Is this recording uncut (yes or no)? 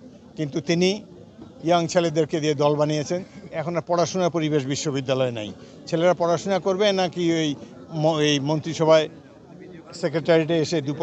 yes